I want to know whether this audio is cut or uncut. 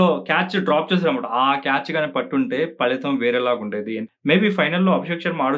cut